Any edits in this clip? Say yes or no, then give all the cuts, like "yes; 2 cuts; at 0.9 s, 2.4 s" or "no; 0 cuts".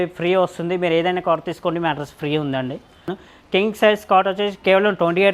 yes; 1 cut; at 3.1 s